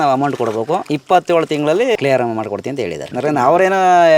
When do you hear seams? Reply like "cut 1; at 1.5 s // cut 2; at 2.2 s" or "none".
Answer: cut 1; at 0.9 s // cut 2; at 2.0 s // cut 3; at 3.1 s